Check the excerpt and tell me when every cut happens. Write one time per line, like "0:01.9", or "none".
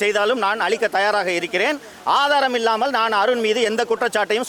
none